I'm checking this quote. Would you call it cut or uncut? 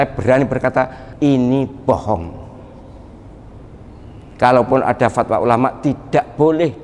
cut